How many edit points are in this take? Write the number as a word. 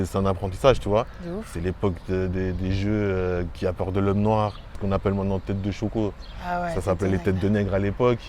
one